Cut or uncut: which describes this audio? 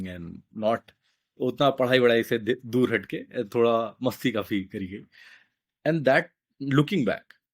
uncut